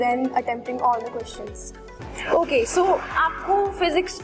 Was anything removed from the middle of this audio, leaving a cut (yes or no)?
yes